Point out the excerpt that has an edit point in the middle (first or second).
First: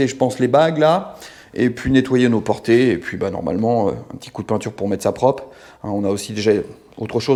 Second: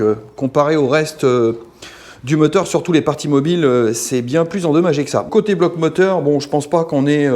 second